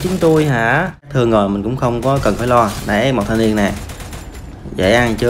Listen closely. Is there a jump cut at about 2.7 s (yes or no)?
no